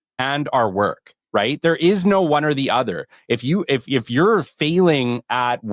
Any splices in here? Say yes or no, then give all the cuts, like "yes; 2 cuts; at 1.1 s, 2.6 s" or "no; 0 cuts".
no; 0 cuts